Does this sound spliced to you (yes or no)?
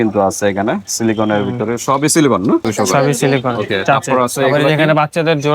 yes